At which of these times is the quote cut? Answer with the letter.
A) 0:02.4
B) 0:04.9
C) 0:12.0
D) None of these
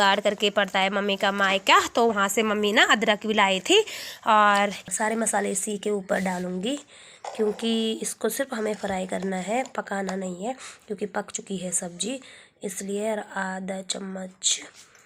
B